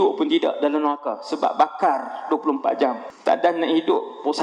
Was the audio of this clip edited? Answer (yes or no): yes